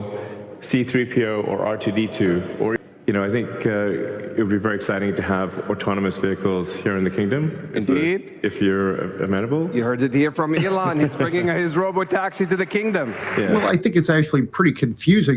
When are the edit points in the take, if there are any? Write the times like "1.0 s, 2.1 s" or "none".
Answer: 2.8 s, 13.5 s